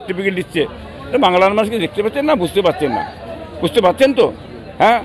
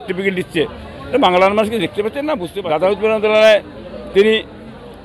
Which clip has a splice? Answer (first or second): second